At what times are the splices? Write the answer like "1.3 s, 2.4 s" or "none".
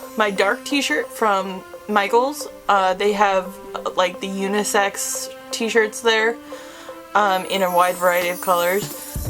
none